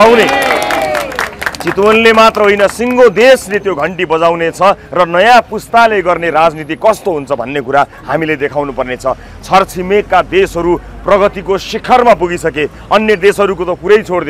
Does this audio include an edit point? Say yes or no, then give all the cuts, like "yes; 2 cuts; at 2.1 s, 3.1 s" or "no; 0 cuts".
no; 0 cuts